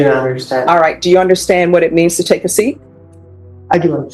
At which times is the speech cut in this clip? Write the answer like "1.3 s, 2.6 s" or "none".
none